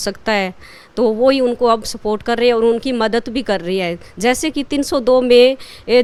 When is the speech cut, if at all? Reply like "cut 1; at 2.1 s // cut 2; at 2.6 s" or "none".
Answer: none